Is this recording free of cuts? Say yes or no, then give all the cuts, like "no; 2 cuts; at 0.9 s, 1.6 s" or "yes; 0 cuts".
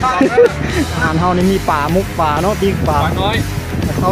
no; 1 cut; at 1.0 s